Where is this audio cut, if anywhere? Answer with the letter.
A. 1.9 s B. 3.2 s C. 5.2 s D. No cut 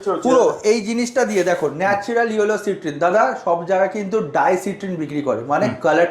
D